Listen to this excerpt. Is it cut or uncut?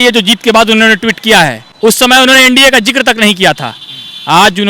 cut